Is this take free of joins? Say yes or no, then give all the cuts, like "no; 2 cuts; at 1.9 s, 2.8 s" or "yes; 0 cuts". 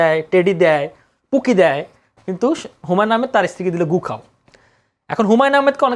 yes; 0 cuts